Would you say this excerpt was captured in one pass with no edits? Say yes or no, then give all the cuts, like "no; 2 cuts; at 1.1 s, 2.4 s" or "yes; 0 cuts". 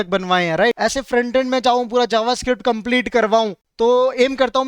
no; 2 cuts; at 0.8 s, 3.6 s